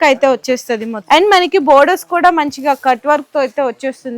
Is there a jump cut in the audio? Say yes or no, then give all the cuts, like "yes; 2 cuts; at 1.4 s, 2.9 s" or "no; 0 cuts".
yes; 1 cut; at 0.9 s